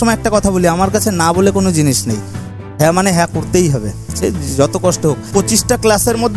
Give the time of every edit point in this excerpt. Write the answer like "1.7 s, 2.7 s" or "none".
5.3 s